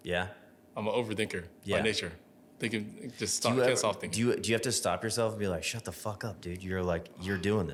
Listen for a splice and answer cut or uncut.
uncut